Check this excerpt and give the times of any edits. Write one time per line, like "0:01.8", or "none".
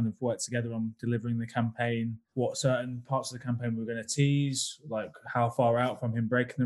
0:02.2